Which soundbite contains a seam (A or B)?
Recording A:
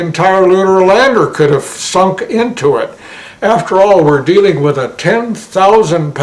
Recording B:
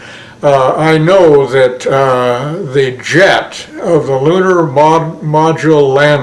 A